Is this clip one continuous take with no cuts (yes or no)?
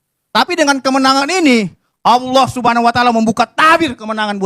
yes